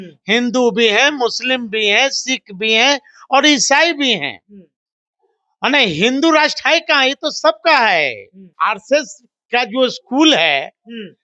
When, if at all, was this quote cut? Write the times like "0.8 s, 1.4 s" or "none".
8.4 s